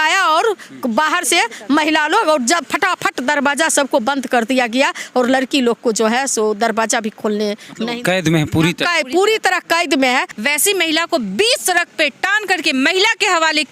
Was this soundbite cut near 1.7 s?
no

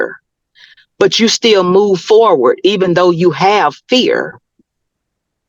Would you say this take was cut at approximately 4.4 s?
no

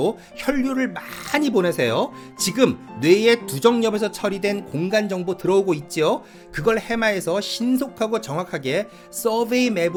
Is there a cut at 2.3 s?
no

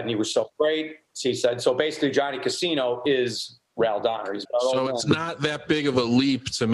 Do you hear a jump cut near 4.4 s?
yes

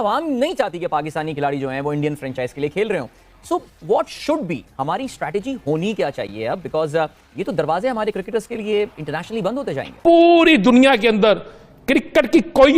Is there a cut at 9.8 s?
yes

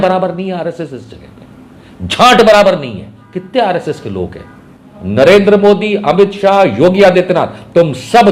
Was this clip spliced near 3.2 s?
no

